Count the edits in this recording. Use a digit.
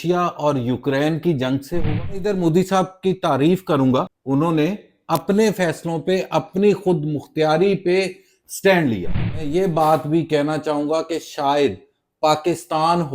3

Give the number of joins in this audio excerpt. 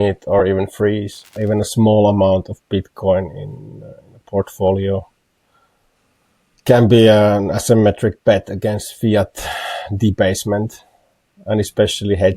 1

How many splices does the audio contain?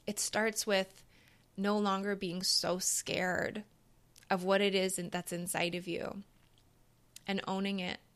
0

